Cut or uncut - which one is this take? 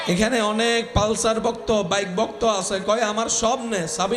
uncut